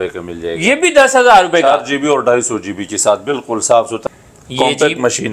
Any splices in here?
yes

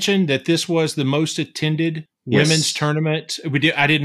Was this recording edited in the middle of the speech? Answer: yes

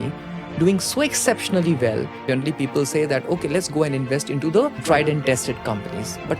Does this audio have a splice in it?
yes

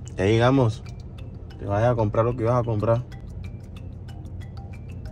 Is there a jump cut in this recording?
yes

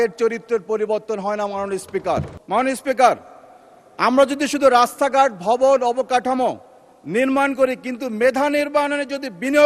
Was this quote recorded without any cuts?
no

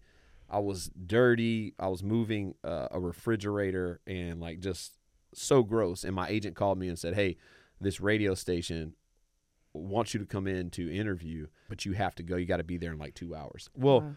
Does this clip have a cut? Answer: yes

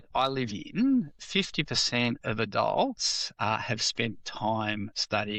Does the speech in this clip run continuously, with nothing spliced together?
yes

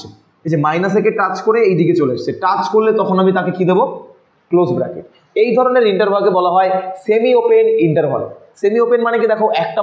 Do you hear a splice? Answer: no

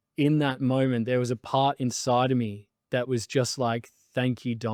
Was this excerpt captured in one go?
yes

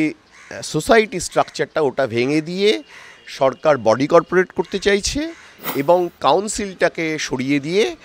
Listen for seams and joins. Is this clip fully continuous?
yes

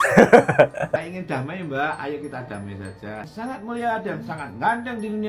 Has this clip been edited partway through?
no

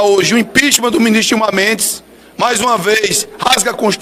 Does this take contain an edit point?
no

